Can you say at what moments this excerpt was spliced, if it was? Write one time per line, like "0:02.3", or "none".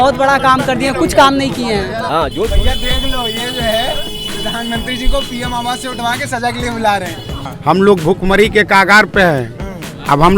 0:02.0
0:07.4